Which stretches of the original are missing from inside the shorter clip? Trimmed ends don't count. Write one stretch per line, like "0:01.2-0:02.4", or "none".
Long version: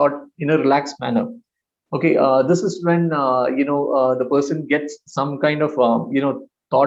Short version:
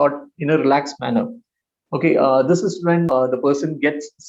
0:03.1-0:04.0